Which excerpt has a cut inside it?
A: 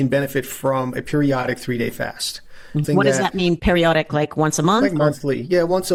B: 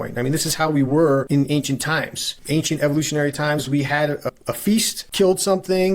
B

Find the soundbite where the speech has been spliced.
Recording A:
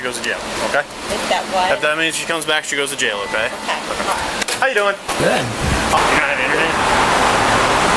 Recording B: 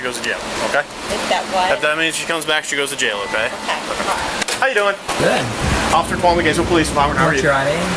A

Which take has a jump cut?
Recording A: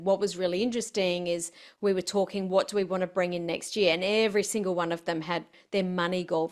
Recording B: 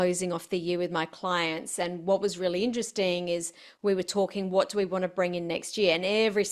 A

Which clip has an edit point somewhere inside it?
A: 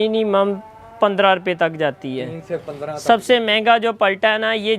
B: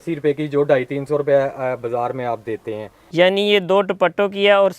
B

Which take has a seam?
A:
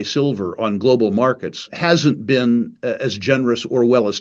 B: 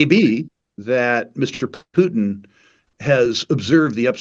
A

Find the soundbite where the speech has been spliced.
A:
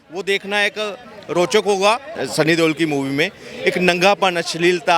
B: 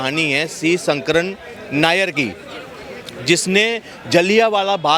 A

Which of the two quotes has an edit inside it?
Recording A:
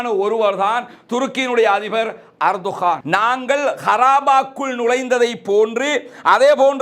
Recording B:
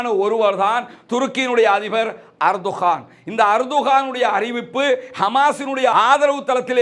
A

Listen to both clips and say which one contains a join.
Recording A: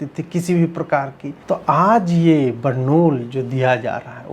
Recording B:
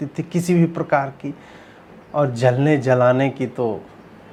A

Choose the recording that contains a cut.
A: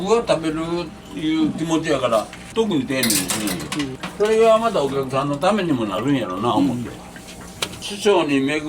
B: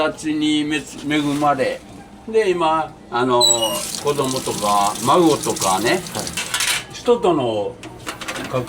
A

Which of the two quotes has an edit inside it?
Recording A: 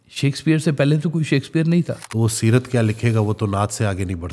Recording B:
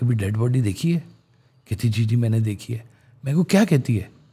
A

